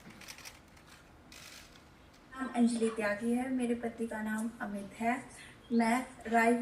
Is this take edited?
yes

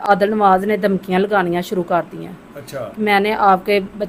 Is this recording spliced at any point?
no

